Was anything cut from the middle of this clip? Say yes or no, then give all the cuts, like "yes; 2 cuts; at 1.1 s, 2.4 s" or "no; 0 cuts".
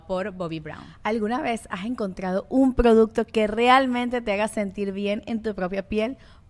no; 0 cuts